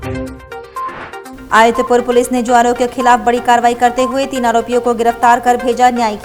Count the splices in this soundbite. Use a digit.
0